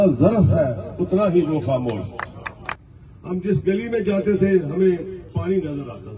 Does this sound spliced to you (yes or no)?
yes